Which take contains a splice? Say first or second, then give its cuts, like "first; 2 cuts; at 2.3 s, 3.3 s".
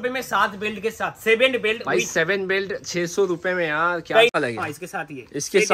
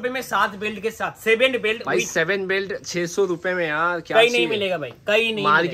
first; 1 cut; at 4.4 s